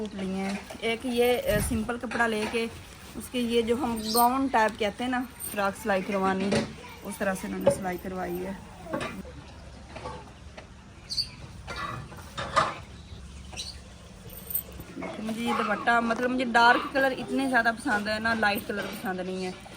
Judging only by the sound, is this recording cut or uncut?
cut